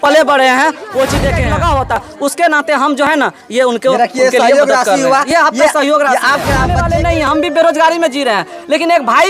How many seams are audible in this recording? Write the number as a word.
two